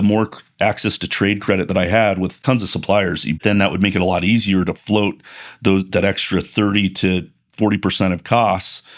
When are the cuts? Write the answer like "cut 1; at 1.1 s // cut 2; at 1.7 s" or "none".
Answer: cut 1; at 2.4 s // cut 2; at 3.4 s